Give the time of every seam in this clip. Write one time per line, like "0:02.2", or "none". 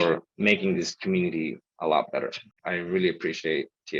0:02.5